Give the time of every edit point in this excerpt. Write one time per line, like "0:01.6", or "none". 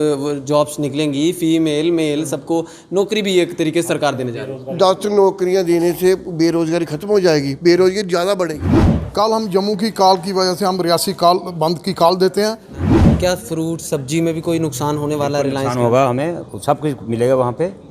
0:08.6
0:12.9